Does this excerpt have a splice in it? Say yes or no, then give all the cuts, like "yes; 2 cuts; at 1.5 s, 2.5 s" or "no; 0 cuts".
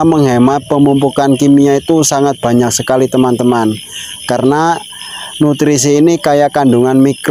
no; 0 cuts